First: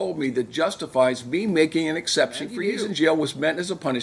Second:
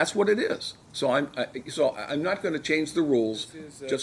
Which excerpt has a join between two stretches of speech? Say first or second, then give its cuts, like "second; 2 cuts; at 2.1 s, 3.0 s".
first; 1 cut; at 2.6 s